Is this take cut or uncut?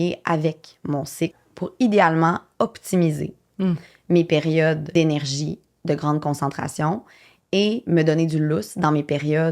cut